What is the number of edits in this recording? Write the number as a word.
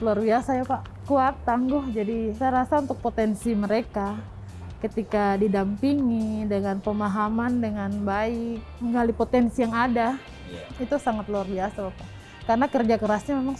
three